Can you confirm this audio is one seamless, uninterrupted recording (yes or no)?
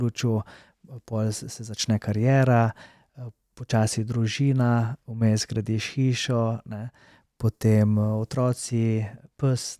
yes